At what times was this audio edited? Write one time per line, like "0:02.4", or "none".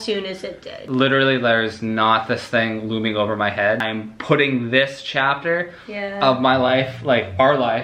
0:00.9
0:03.8